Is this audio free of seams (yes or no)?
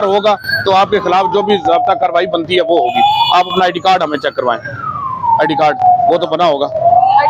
yes